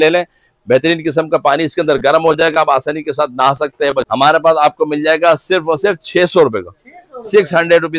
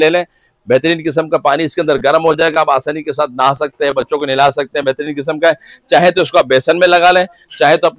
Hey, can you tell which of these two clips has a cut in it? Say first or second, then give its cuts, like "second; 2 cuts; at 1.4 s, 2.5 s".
first; 1 cut; at 4.1 s